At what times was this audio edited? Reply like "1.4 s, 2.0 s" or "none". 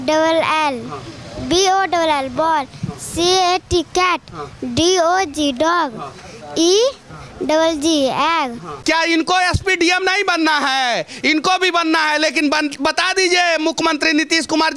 8.7 s